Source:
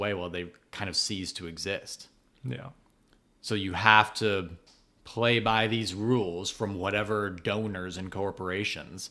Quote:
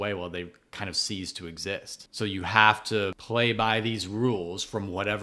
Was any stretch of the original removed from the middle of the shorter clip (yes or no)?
yes